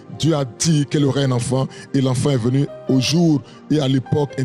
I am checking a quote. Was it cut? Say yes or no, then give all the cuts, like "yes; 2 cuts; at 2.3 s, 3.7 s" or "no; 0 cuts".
no; 0 cuts